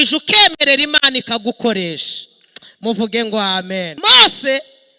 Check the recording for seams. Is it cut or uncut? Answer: cut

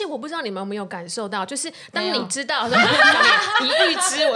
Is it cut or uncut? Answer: uncut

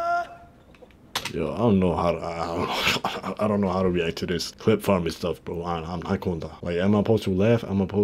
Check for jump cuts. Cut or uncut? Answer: uncut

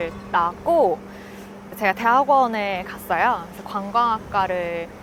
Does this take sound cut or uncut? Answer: uncut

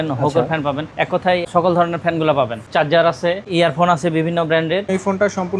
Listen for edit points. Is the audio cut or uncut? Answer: cut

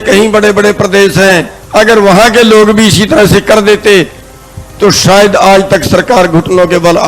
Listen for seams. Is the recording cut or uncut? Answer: cut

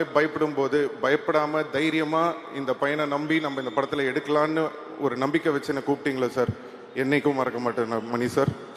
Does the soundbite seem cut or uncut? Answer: uncut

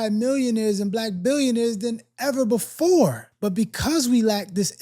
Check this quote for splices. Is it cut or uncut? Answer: cut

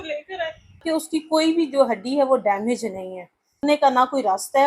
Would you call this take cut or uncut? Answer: cut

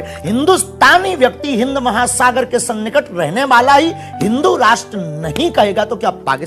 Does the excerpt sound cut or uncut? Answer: uncut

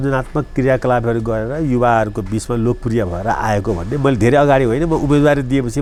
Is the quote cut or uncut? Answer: uncut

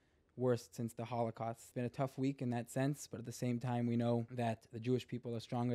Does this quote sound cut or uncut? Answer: cut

